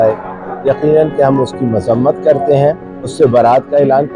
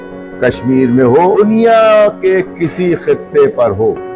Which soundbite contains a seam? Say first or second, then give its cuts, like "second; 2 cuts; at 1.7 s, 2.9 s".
second; 1 cut; at 1.3 s